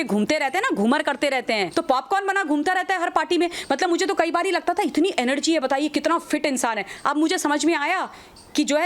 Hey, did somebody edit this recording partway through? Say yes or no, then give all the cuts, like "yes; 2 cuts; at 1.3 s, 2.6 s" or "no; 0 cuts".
yes; 1 cut; at 1.7 s